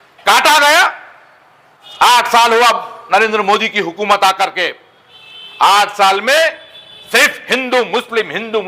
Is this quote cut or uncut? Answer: cut